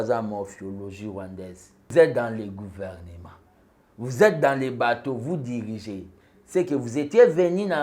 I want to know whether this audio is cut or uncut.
cut